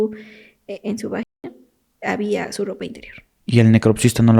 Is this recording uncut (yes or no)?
no